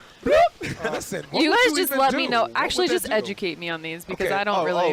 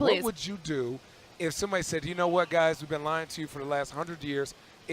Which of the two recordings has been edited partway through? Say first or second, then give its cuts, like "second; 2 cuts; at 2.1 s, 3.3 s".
second; 1 cut; at 2.5 s